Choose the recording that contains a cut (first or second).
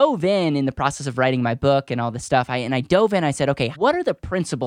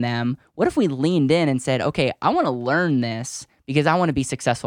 first